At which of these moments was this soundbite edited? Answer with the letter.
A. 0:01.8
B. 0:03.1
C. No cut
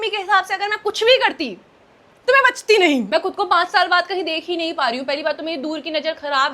B